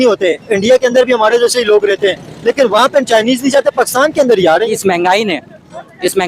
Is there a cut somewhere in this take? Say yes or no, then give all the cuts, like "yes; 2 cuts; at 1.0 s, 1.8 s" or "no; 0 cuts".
yes; 1 cut; at 4.8 s